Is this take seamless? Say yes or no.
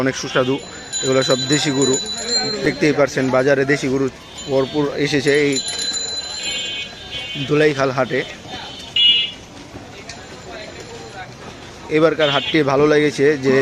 yes